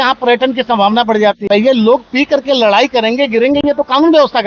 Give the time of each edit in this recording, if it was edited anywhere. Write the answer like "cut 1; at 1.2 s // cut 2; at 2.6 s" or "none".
cut 1; at 1.4 s